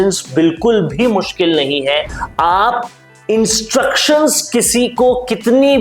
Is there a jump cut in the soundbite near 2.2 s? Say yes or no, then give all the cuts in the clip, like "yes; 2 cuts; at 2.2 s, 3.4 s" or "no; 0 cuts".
yes; 1 cut; at 2.2 s